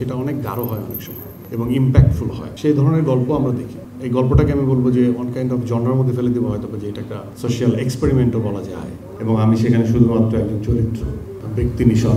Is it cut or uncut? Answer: cut